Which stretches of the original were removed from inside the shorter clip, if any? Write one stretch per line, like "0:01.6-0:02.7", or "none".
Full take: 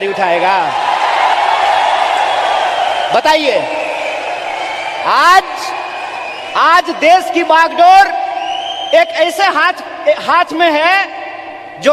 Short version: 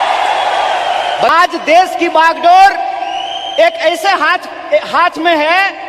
0:03.2-0:06.6

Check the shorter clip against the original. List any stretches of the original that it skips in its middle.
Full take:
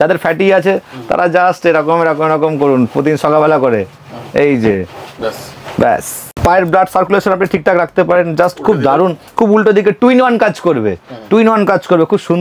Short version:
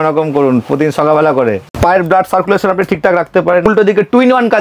0:03.9-0:06.3
0:08.3-0:09.5

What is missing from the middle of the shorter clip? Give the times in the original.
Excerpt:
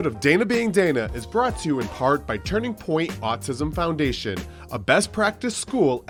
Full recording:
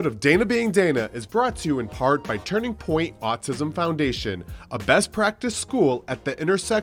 none

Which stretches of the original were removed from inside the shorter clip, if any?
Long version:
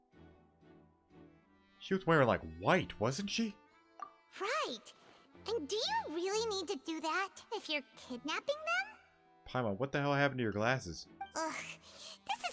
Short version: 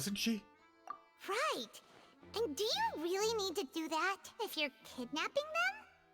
none

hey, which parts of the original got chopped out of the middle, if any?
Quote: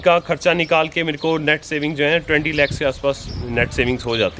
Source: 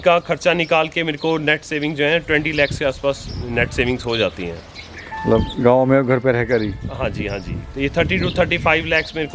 none

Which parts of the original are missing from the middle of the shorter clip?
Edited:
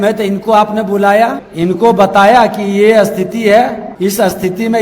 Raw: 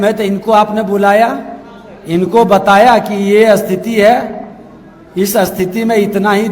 0:01.5-0:02.0
0:04.4-0:05.0

